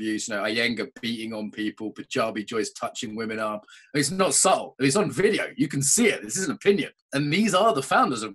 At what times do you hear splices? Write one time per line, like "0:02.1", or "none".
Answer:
0:07.0